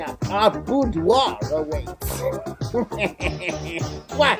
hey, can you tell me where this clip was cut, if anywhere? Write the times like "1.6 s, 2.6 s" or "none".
none